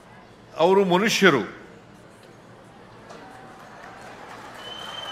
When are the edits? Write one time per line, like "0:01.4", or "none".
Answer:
none

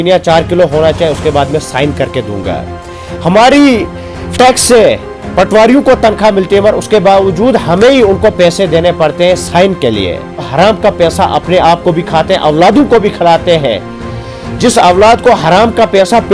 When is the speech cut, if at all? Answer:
0:10.5

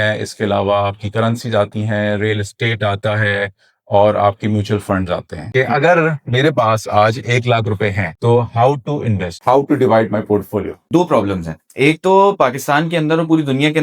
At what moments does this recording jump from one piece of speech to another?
0:05.4
0:10.8

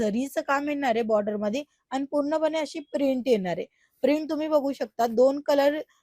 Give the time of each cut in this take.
none

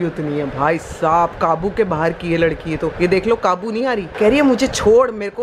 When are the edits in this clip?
0:04.1

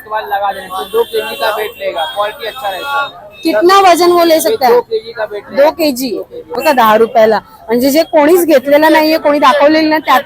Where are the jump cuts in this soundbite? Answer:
0:06.5

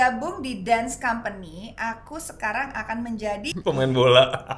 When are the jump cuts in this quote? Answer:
0:03.5

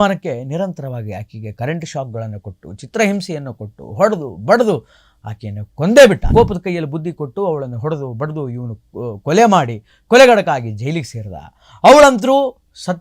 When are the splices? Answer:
0:06.2

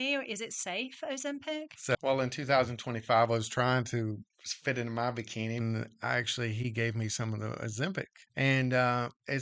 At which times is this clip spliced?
0:02.0
0:05.6
0:08.2

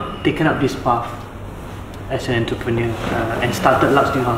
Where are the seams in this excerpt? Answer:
none

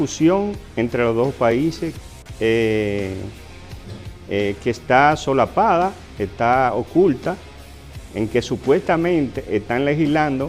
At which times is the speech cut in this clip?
none

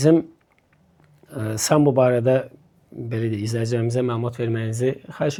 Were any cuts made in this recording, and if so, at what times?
none

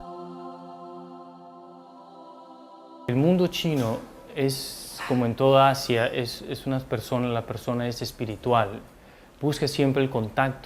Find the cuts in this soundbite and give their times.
0:01.5

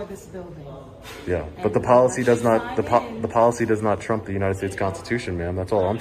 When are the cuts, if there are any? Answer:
none

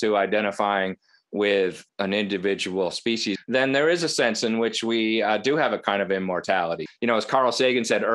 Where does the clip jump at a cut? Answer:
0:01.9
0:03.4
0:06.8

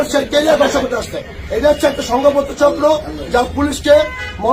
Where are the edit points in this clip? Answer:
none

